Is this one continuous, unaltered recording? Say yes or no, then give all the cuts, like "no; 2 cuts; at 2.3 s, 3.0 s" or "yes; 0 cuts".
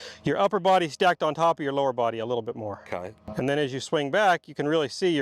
yes; 0 cuts